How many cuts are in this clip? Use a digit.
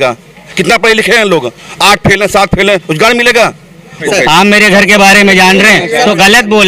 1